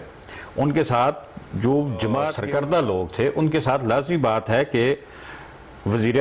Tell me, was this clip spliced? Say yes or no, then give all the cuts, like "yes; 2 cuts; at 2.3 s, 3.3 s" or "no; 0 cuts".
yes; 1 cut; at 2.4 s